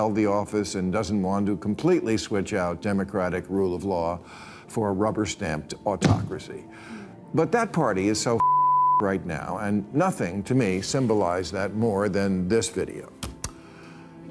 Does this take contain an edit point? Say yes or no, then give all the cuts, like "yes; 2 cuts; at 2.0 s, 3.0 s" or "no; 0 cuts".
no; 0 cuts